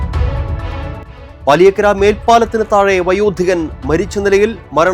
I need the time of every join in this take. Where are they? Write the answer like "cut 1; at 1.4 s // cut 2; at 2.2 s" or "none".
cut 1; at 1.1 s